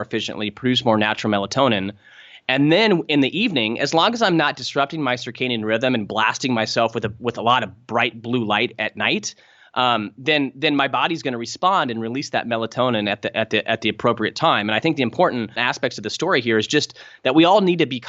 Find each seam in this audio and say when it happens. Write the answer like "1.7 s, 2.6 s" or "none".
15.7 s